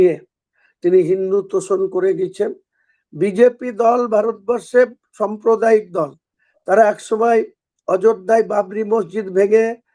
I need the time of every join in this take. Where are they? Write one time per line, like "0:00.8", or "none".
none